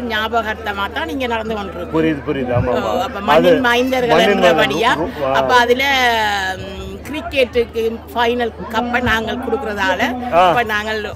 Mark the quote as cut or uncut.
uncut